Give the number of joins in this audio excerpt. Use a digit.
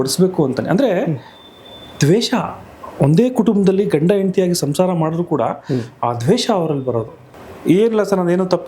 1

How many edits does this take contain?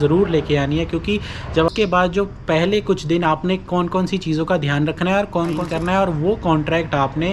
2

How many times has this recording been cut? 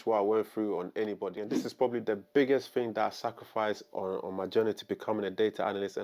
1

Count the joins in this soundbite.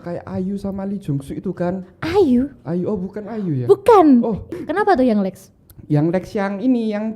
1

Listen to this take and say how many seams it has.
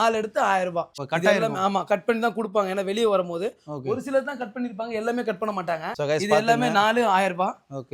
2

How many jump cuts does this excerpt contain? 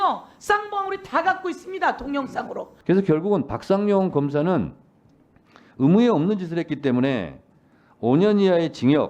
1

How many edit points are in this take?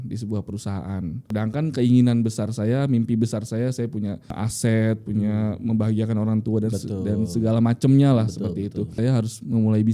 3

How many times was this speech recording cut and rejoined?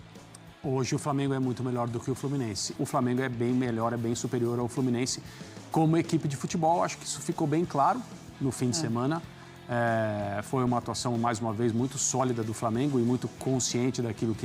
1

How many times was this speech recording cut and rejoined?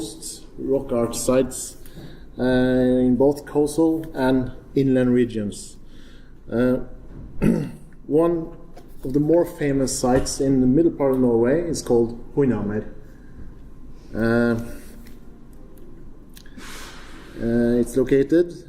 0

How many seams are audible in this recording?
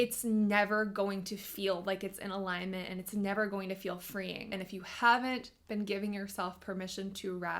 1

